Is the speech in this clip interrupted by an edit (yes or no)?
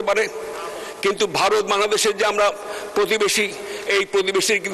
no